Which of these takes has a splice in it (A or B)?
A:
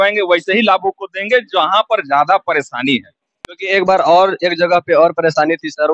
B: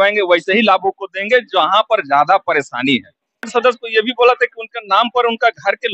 B